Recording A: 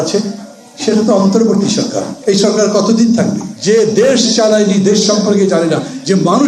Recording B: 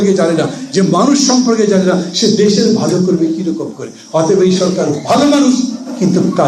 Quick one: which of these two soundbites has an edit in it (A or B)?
A